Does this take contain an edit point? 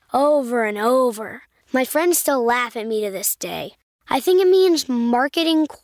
no; 0 cuts

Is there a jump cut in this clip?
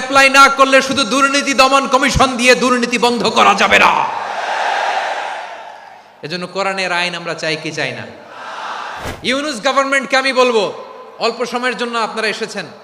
yes; 1 cut; at 9.1 s

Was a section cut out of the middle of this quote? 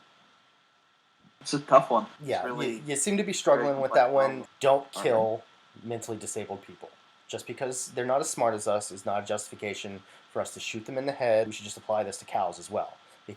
yes; 3 cuts; at 1.4 s, 4.4 s, 11.6 s

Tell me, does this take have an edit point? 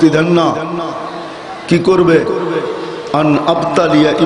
no; 0 cuts

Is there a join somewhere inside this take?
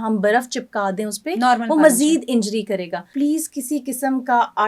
yes; 1 cut; at 3.1 s

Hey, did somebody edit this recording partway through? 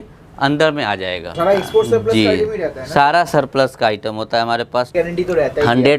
yes; 2 cuts; at 1.4 s, 4.9 s

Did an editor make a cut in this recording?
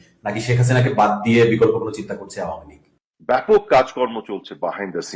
yes; 1 cut; at 3.4 s

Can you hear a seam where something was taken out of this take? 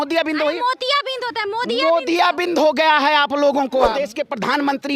yes; 1 cut; at 3.9 s

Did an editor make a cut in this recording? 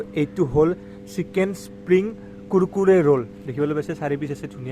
no; 0 cuts

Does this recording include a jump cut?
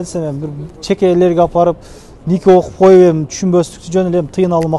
no; 0 cuts

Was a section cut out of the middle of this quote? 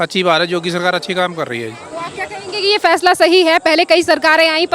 no; 0 cuts

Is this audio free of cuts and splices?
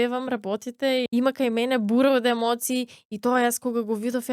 no; 1 cut; at 1.1 s

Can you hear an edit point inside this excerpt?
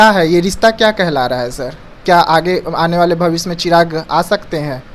no; 0 cuts

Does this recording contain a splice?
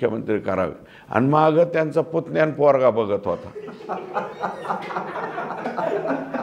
no; 0 cuts

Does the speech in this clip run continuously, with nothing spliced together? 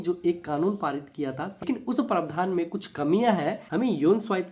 no; 2 cuts; at 1.6 s, 3.6 s

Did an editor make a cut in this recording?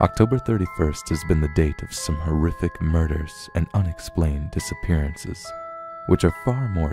no; 0 cuts

